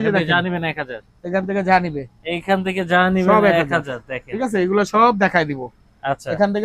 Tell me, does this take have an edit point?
no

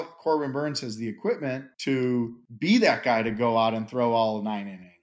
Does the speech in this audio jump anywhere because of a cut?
yes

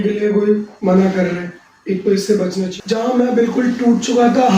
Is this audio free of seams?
no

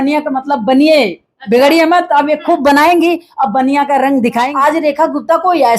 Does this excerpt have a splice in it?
yes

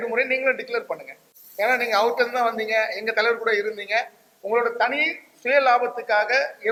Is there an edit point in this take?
no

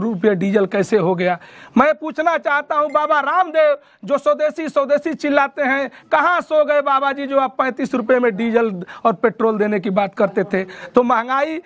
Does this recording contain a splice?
no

